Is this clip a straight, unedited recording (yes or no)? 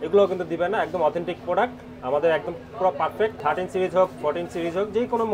no